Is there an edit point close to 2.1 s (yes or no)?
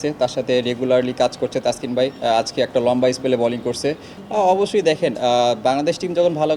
no